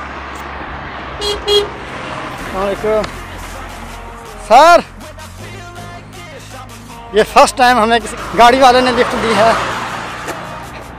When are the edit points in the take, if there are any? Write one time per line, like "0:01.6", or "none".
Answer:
0:08.3